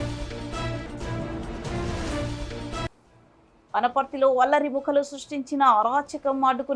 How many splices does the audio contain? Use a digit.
2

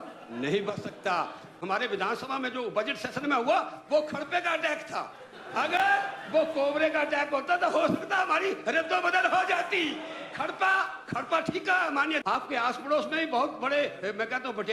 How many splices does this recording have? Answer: 2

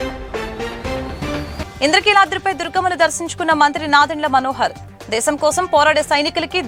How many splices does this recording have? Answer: 0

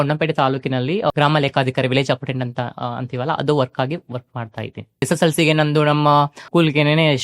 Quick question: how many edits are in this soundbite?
3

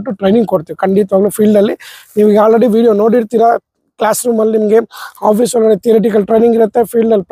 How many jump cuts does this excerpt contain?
0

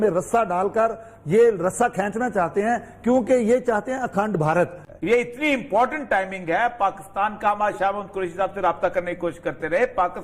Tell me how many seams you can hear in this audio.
1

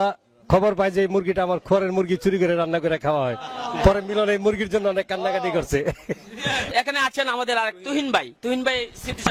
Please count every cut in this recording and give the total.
0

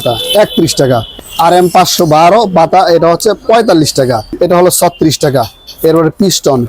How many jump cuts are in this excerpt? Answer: 2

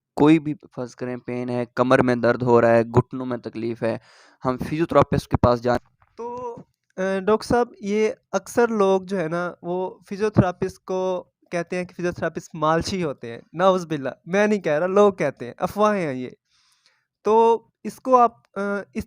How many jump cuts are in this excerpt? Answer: 1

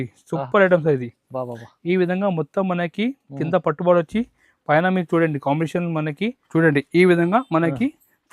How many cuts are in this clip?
1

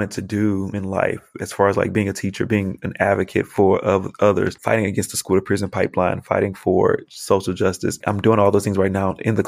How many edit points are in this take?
0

